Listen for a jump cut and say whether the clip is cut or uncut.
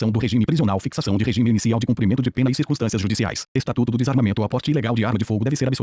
cut